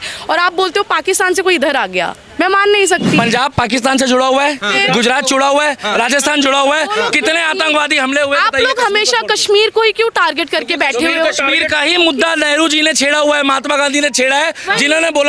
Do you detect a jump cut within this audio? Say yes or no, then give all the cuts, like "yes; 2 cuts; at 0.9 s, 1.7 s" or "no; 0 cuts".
yes; 1 cut; at 3.2 s